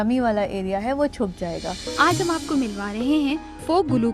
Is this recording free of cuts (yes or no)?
no